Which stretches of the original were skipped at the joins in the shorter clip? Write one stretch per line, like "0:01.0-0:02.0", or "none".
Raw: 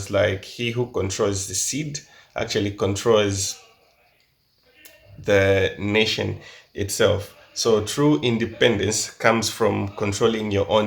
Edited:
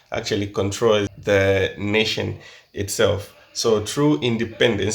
0:03.4-0:05.2

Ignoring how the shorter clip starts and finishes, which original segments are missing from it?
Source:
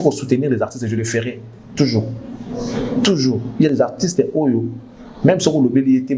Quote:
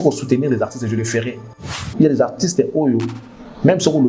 0:01.8-0:03.4

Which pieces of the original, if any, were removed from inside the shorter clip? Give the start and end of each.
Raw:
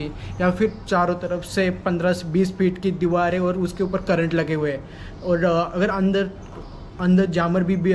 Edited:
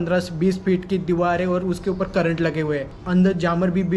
0:04.9-0:06.9

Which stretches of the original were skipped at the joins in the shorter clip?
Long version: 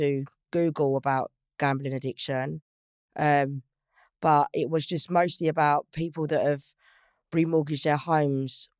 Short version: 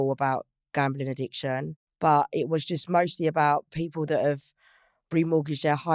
0:02.6-0:04.0

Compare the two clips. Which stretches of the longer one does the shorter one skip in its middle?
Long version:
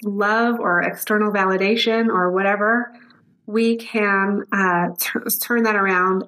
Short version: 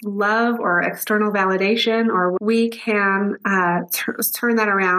0:02.4-0:03.5

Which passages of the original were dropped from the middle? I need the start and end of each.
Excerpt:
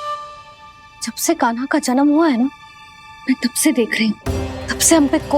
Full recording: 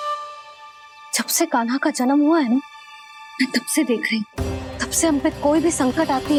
0:01.0-0:01.1

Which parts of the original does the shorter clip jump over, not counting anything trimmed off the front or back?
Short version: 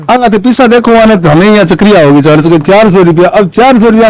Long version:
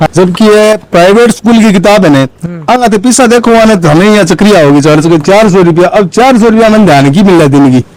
none

